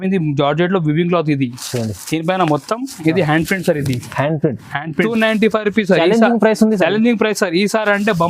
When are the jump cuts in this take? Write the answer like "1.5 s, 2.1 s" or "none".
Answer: 5.1 s